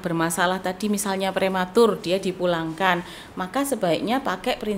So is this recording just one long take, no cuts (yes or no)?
yes